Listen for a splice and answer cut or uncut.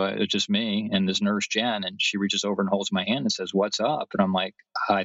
uncut